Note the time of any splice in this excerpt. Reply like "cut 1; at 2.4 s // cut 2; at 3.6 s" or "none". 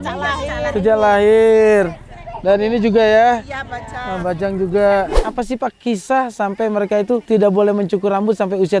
cut 1; at 5.2 s // cut 2; at 7.2 s